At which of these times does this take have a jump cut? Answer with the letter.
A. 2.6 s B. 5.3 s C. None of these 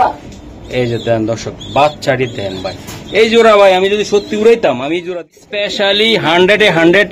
B